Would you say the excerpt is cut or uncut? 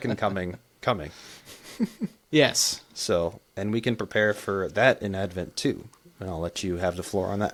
uncut